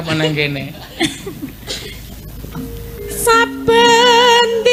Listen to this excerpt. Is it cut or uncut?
uncut